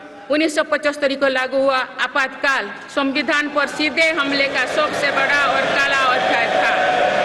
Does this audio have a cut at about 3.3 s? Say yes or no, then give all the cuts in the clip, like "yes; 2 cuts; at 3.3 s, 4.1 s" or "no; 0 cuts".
no; 0 cuts